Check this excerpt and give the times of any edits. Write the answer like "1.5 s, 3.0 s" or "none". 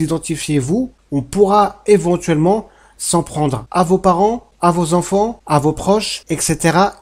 1.0 s, 3.6 s, 4.5 s, 5.4 s, 6.2 s